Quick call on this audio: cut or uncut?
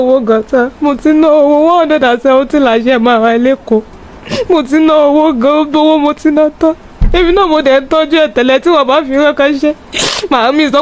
uncut